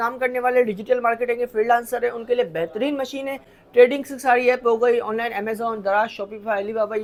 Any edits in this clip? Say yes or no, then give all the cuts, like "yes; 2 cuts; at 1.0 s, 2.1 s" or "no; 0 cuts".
no; 0 cuts